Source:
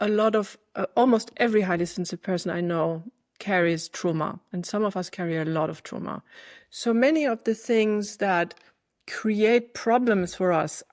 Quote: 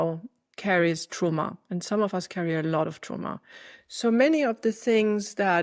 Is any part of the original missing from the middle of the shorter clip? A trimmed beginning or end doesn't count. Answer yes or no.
no